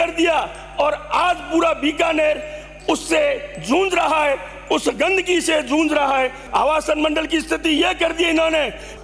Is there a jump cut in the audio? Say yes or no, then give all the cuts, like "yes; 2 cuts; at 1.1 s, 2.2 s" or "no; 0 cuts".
yes; 1 cut; at 6.4 s